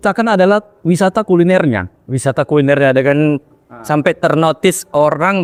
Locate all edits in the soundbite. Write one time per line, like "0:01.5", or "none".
none